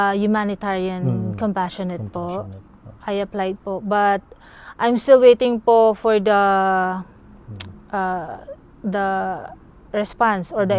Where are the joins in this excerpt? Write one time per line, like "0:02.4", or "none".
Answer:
none